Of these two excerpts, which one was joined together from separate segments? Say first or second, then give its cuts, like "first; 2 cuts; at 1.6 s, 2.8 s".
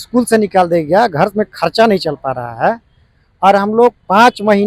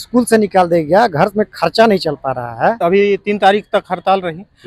second; 1 cut; at 2.8 s